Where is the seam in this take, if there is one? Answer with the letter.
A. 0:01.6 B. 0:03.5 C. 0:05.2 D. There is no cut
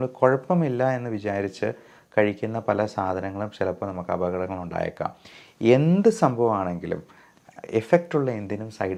D